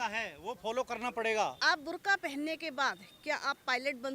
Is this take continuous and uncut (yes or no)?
no